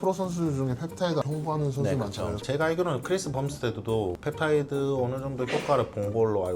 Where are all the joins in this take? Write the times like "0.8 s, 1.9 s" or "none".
1.2 s, 2.4 s